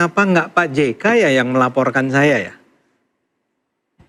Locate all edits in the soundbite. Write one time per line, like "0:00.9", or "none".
none

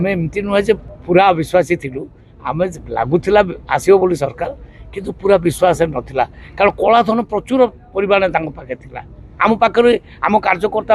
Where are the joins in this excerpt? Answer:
0:00.9

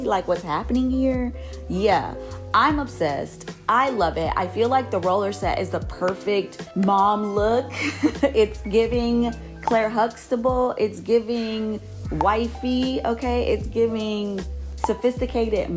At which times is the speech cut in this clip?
none

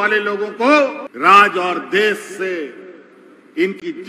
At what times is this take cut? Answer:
0:01.0

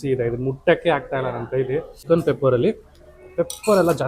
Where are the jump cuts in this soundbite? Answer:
0:01.9

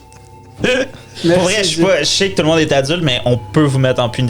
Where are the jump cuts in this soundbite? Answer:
0:01.1

